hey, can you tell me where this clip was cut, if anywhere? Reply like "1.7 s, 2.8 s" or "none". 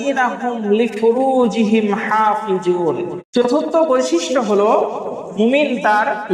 3.2 s